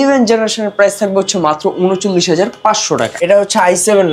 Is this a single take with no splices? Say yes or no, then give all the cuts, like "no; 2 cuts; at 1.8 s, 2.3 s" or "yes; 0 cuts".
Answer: no; 1 cut; at 3.1 s